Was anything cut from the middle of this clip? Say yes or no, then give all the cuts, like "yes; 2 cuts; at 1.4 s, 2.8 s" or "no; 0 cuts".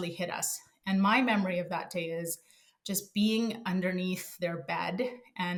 no; 0 cuts